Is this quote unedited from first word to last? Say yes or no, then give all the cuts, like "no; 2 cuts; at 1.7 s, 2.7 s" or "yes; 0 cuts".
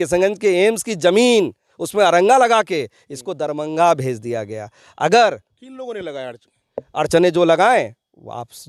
yes; 0 cuts